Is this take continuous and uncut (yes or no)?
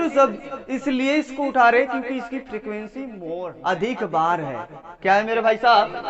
no